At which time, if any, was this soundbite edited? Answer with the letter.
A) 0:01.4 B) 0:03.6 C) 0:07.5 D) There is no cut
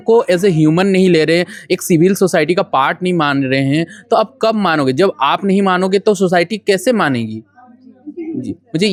D